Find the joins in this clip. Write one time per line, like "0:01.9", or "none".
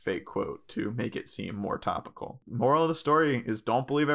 0:02.4